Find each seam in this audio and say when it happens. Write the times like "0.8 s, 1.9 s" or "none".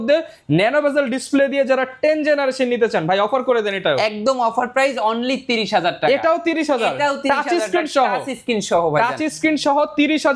none